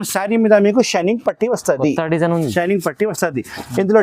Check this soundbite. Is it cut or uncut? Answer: uncut